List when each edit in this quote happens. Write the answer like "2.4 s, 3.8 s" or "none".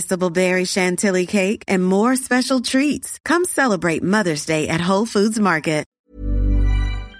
5.9 s

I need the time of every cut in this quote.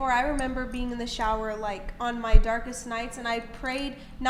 none

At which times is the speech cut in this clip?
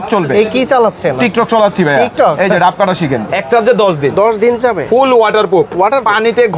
3.3 s

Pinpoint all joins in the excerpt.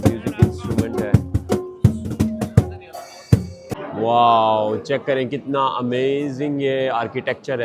3.8 s

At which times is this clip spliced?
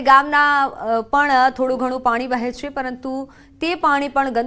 none

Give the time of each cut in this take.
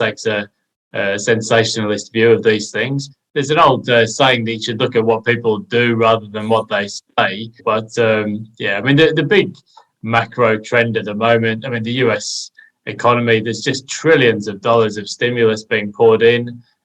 3.0 s, 7.6 s

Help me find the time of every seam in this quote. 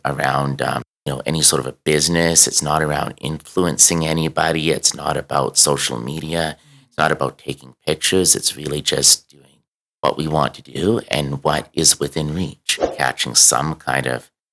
0.9 s, 12.9 s

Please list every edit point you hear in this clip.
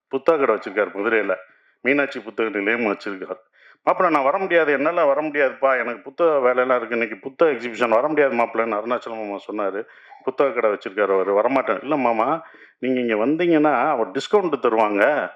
none

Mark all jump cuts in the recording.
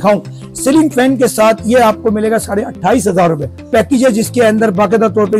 3.7 s

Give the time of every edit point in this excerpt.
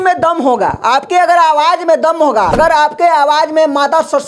2.5 s

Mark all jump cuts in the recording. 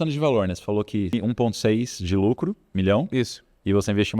1.1 s

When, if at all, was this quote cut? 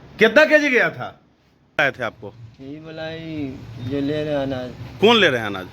1.8 s

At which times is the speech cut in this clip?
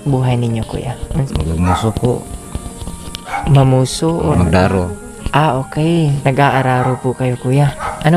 1.3 s, 4.3 s, 6.2 s

